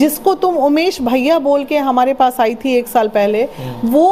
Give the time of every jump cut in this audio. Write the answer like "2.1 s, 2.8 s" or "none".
none